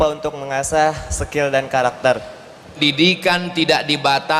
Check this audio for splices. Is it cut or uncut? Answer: cut